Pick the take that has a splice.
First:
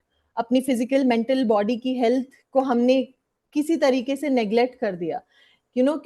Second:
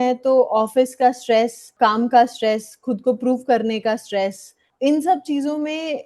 second; 2 cuts; at 1.6 s, 4.7 s

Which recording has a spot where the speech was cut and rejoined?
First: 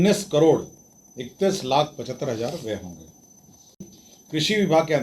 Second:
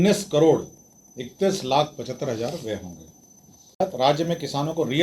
first; 1 cut; at 3.7 s

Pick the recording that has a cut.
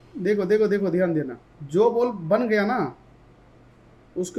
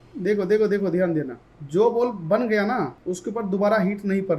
second; 1 cut; at 3.0 s

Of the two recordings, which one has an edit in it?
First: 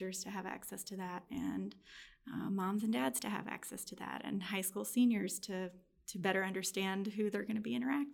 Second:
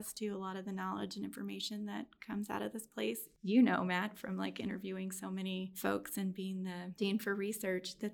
second; 3 cuts; at 3.3 s, 5.7 s, 7.0 s

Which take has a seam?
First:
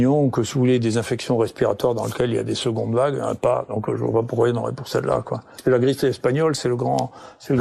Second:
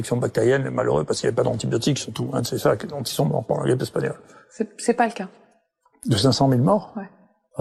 first; 1 cut; at 5.5 s

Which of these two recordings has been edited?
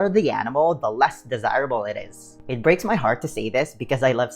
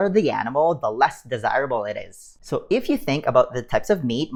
first; 1 cut; at 2.3 s

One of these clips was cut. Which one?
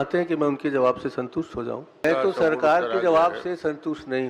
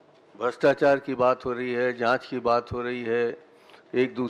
first; 1 cut; at 2.0 s

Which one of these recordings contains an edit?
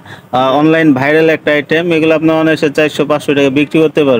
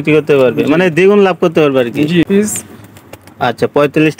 second; 1 cut; at 2.3 s

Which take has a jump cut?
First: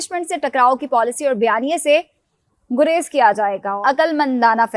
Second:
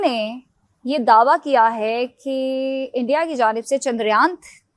first; 1 cut; at 3.8 s

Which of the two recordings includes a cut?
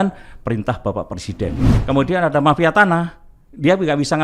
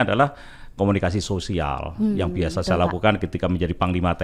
first; 1 cut; at 1.8 s

